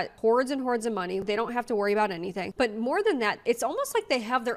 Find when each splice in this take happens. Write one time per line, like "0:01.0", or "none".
none